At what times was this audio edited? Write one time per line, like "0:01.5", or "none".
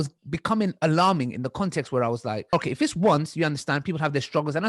0:02.5